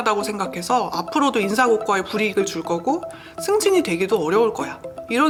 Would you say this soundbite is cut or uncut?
uncut